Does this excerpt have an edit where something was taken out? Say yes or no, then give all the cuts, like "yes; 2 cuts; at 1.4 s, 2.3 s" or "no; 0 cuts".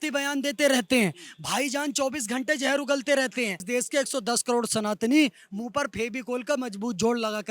yes; 1 cut; at 3.6 s